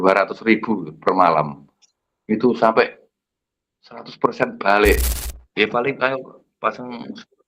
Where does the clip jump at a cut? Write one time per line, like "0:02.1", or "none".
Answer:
0:05.1